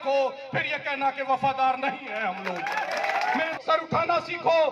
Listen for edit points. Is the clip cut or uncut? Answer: cut